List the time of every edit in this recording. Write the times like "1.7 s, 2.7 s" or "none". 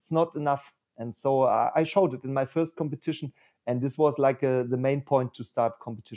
none